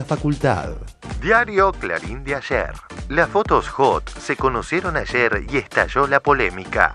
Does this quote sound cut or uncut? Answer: uncut